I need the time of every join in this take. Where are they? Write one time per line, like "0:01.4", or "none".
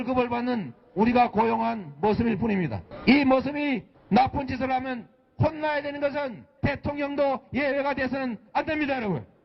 0:01.4